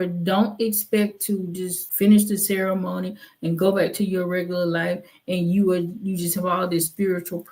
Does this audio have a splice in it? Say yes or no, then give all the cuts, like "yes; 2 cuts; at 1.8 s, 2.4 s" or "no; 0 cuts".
yes; 1 cut; at 1.8 s